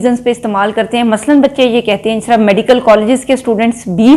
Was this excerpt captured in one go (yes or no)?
yes